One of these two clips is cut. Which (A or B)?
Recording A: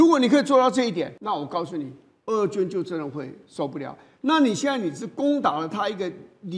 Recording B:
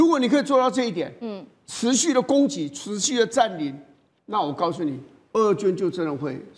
A